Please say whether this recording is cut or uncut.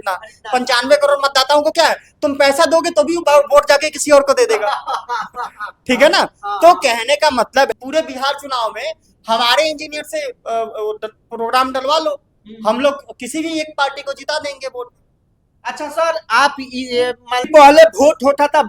cut